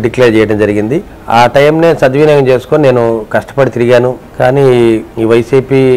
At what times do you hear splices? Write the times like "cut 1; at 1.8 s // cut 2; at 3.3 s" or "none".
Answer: cut 1; at 1.1 s // cut 2; at 4.2 s // cut 3; at 5.1 s